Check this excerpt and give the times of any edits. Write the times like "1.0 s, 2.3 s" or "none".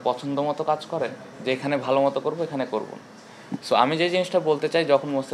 none